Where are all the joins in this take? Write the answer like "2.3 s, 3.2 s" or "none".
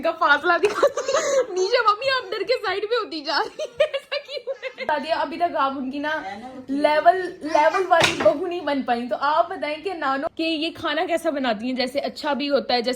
4.9 s, 10.2 s

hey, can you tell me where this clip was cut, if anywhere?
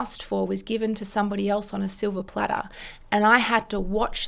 none

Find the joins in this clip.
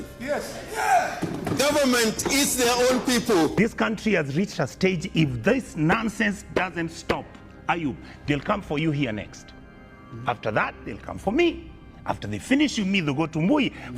3.5 s

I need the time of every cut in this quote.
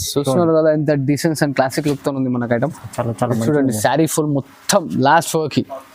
none

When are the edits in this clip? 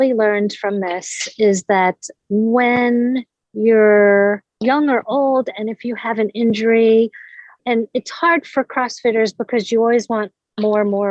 2.1 s, 7.6 s

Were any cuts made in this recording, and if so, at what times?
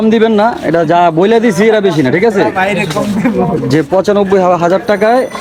none

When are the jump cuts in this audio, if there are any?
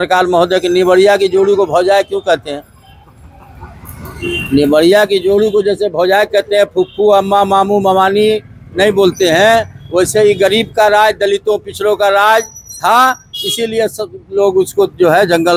none

